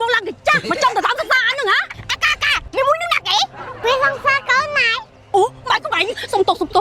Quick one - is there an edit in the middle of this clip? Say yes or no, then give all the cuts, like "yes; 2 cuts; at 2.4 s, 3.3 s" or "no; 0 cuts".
no; 0 cuts